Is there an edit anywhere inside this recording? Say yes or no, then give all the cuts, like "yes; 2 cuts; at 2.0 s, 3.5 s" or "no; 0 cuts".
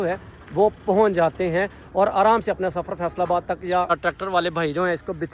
yes; 1 cut; at 3.9 s